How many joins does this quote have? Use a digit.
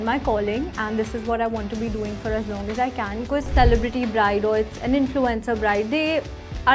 1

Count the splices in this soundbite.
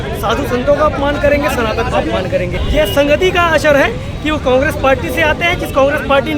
1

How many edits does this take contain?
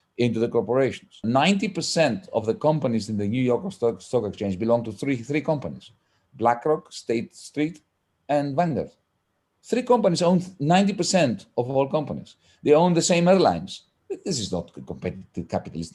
1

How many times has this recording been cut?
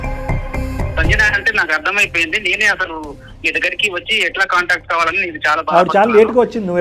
2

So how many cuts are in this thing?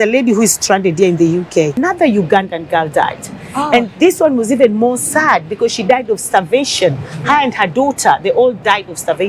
1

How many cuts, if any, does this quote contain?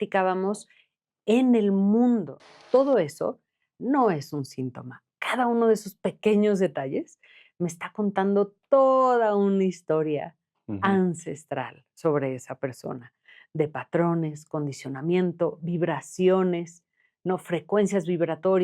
1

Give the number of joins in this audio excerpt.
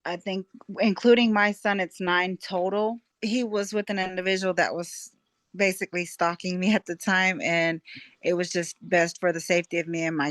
1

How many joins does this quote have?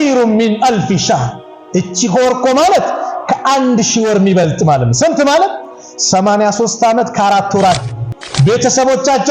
1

